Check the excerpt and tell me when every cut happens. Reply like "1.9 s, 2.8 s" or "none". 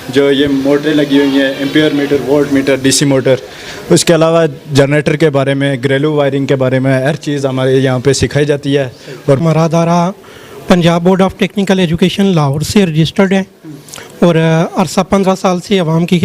9.4 s